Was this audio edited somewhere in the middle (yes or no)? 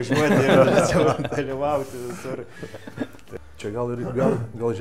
yes